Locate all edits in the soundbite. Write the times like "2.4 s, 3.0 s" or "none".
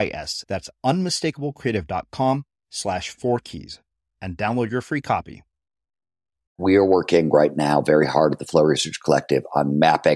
6.6 s